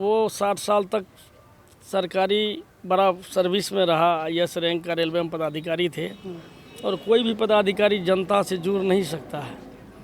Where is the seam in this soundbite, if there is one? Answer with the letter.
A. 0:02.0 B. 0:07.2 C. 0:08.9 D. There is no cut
D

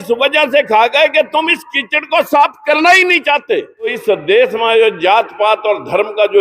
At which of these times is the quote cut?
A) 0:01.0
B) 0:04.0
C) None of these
B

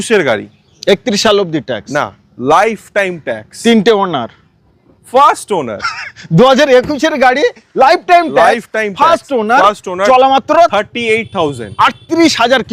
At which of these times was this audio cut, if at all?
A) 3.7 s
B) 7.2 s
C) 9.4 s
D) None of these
D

